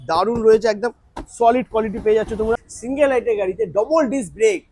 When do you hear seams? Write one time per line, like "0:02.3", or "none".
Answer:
0:02.7